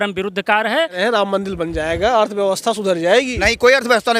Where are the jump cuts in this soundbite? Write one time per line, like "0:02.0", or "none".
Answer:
0:01.0